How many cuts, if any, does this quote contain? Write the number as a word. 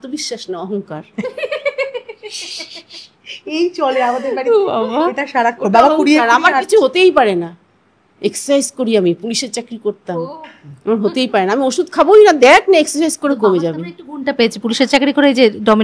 zero